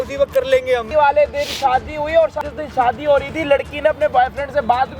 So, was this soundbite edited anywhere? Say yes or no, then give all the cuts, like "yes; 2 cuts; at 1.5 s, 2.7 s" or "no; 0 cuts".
yes; 2 cuts; at 0.9 s, 2.5 s